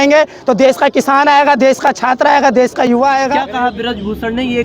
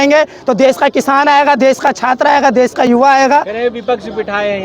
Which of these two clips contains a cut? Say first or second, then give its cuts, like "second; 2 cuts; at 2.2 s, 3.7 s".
first; 1 cut; at 3.5 s